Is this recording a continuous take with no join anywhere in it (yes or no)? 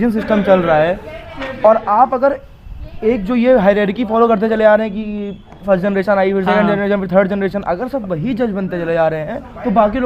yes